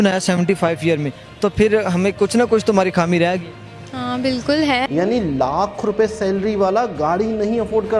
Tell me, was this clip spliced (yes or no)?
yes